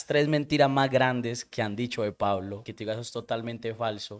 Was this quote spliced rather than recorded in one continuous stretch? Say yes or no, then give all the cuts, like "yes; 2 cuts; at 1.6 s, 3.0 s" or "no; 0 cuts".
no; 0 cuts